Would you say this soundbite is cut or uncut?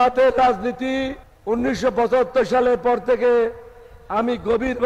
uncut